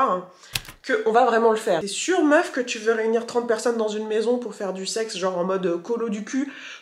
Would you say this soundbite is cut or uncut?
cut